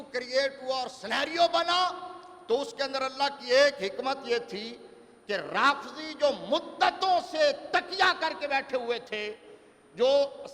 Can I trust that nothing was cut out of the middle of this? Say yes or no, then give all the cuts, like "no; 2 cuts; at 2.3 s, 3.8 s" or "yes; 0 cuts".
yes; 0 cuts